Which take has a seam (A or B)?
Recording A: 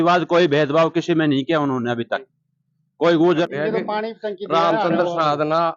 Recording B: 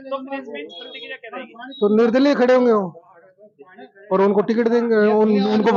A